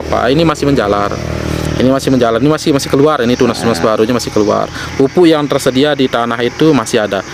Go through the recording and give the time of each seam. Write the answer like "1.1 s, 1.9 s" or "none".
none